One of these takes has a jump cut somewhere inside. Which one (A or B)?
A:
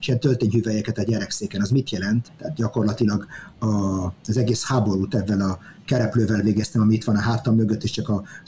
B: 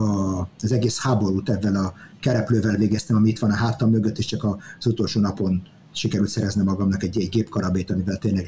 A